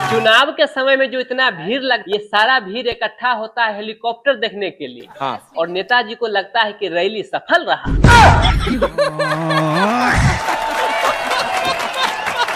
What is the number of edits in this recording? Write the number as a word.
one